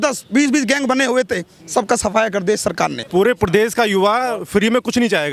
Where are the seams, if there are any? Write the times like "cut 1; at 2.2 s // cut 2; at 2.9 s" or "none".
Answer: cut 1; at 3.0 s